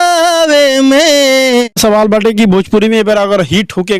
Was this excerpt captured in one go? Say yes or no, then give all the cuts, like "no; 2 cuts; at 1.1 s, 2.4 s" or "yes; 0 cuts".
no; 1 cut; at 1.7 s